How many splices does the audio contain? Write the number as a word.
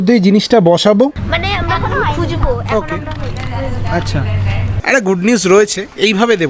two